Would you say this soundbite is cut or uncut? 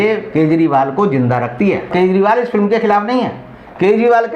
cut